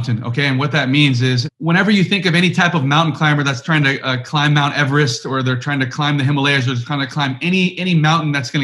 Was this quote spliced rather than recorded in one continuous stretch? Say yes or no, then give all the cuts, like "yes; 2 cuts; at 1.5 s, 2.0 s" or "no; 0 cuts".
yes; 1 cut; at 1.4 s